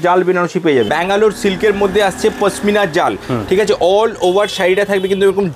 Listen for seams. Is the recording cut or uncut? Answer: cut